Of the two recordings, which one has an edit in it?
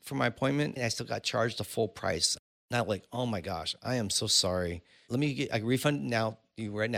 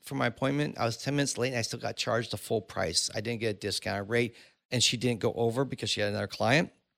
first; 3 cuts; at 0.8 s, 2.3 s, 5.0 s

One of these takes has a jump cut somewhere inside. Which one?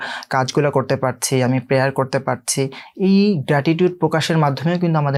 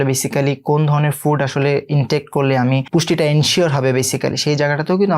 second; 1 cut; at 2.8 s

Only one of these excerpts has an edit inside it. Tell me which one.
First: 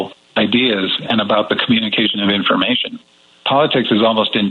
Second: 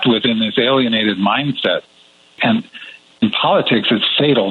second; 1 cut; at 2.3 s

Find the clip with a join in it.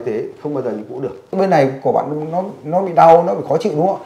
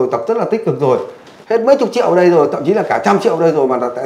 first; 1 cut; at 1.3 s

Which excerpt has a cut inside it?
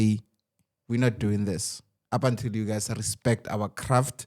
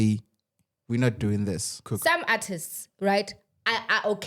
second; 1 cut; at 1.9 s

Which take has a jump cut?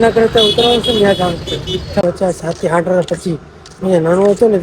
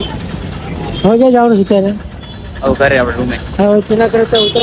first; 1 cut; at 2.0 s

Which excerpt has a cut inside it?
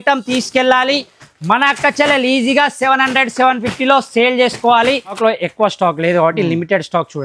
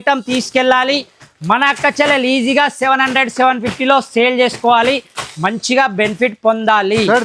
first; 1 cut; at 5.2 s

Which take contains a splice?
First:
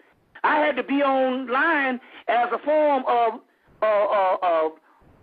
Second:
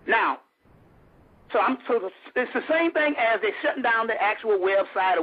first; 1 cut; at 3.0 s

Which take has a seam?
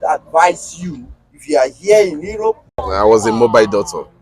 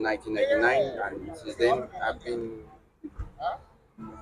first; 1 cut; at 2.9 s

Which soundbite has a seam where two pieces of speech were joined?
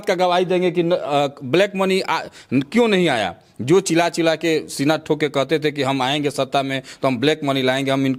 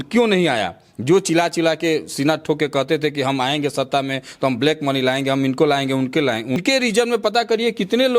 second; 1 cut; at 6.6 s

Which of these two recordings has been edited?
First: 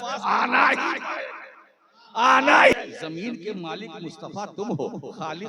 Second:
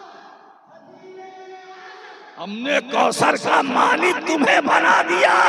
first; 1 cut; at 2.7 s

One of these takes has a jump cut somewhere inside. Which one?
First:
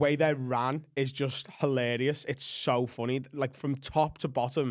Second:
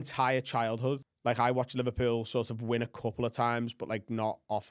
second; 1 cut; at 1.1 s

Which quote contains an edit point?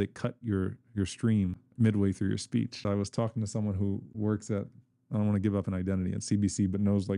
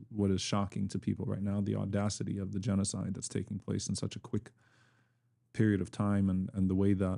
first; 3 cuts; at 1.6 s, 2.8 s, 4.1 s

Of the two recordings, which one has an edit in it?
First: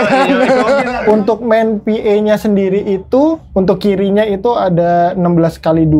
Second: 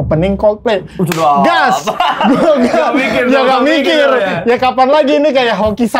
first; 2 cuts; at 0.9 s, 3.4 s

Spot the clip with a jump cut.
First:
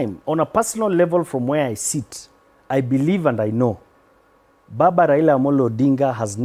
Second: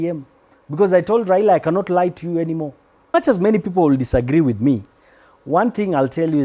second; 1 cut; at 3.1 s

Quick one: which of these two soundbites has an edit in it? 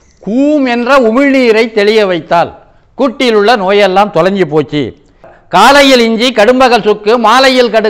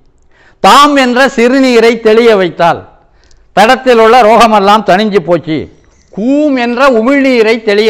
first; 1 cut; at 5.3 s

